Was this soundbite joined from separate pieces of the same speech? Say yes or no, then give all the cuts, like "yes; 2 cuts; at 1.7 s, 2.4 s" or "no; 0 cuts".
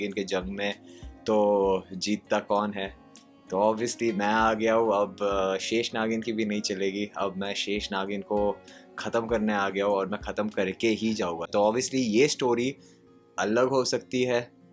no; 0 cuts